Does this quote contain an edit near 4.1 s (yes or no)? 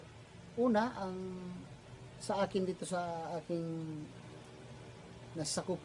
yes